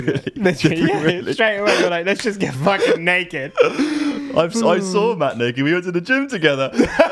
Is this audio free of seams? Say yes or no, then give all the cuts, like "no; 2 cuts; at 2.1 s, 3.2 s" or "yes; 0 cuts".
yes; 0 cuts